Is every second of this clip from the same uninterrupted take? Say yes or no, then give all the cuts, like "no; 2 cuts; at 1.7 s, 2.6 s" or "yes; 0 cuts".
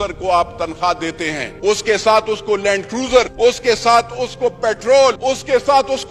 no; 3 cuts; at 1.4 s, 3.3 s, 5.2 s